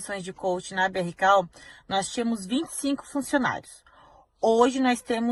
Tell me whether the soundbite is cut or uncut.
uncut